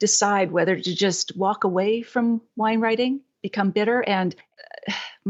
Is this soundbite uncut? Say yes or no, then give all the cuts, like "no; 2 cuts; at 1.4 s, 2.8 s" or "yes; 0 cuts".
yes; 0 cuts